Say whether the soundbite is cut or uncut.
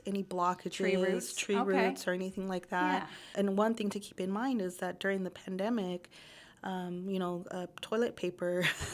cut